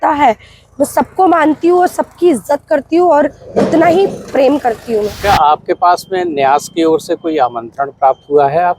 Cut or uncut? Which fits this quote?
cut